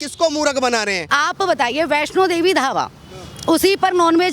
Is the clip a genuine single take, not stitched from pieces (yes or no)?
no